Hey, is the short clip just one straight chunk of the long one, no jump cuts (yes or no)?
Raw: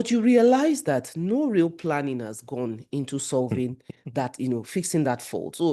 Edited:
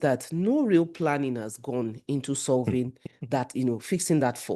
yes